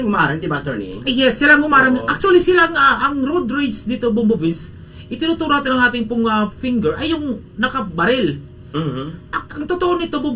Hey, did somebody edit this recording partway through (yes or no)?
no